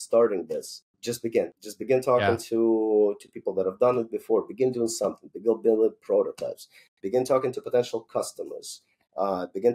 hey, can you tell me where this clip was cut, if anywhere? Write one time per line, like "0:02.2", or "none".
0:01.2